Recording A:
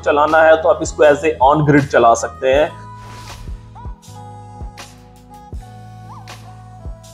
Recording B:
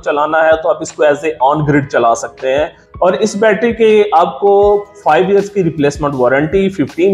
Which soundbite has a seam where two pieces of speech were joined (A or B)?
B